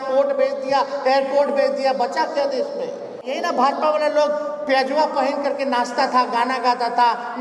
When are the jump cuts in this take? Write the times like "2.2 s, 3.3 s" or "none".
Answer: 3.3 s